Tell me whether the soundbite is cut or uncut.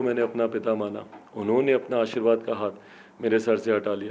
uncut